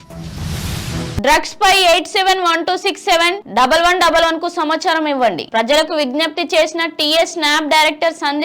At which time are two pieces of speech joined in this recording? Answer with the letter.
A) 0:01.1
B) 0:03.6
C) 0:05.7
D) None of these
A